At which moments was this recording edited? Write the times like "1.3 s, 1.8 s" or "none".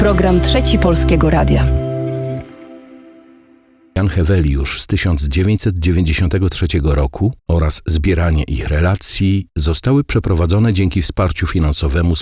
4.0 s